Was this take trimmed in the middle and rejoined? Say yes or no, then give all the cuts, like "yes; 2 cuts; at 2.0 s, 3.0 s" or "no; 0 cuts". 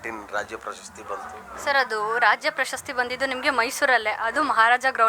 no; 0 cuts